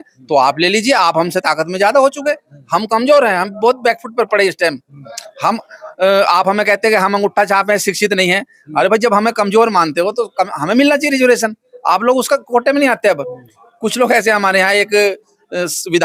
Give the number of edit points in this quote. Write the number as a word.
zero